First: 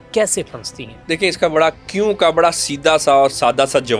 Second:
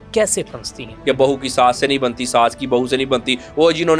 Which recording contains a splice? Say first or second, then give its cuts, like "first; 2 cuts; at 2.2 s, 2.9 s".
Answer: second; 1 cut; at 0.9 s